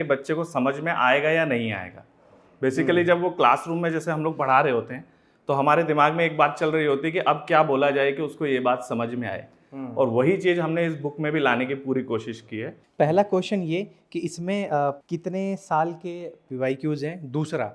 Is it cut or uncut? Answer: cut